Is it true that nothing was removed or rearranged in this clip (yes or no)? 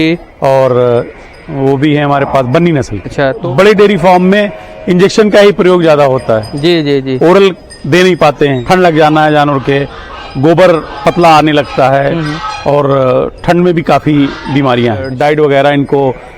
no